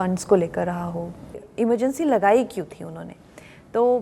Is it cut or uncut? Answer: cut